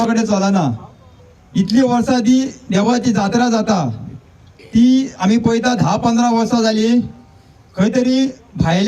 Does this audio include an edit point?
yes; 1 cut; at 1.2 s

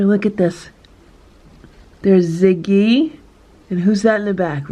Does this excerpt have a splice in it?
no; 0 cuts

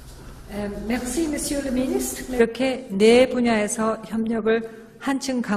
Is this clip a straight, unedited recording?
yes; 0 cuts

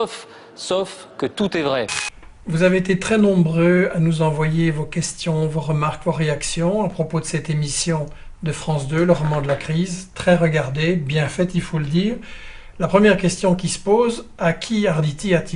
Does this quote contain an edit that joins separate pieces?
yes; 1 cut; at 9.7 s

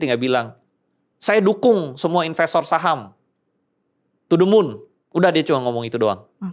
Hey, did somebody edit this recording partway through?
no; 0 cuts

